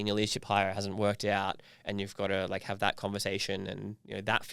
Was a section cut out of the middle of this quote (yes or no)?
no